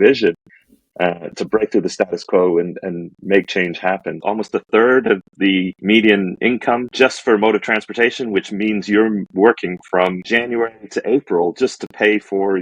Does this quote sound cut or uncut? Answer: cut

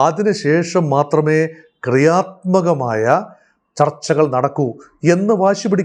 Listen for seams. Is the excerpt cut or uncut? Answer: uncut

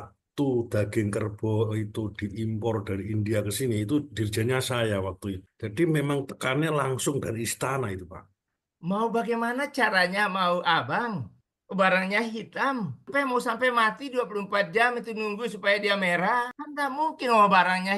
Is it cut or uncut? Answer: cut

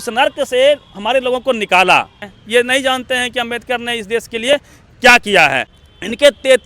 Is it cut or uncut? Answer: cut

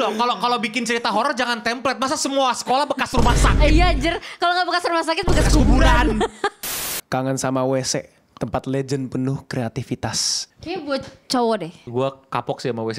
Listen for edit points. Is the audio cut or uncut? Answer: cut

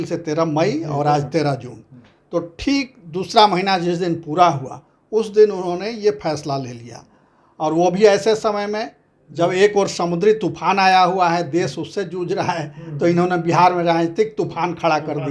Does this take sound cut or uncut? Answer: uncut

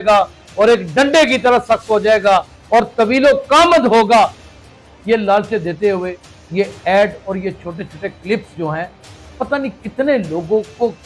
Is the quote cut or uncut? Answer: uncut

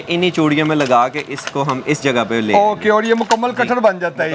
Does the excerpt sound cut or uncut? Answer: uncut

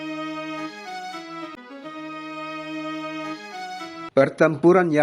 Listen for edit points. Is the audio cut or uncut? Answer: cut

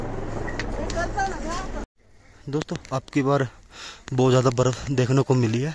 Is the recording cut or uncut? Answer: cut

